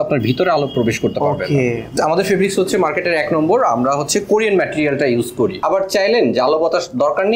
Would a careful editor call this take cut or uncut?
cut